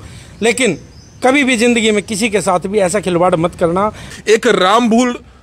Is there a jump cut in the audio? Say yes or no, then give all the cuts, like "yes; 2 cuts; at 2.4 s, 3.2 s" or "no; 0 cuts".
yes; 1 cut; at 4.1 s